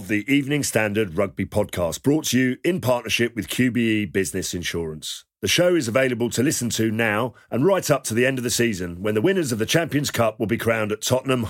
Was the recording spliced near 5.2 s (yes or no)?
no